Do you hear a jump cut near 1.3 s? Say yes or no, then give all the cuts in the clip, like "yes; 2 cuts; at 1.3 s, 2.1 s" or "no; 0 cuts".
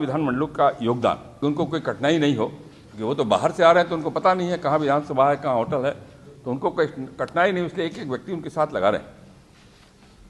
yes; 1 cut; at 1.3 s